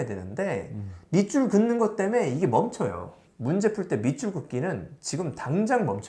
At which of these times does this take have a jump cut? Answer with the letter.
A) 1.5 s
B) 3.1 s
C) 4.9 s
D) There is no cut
B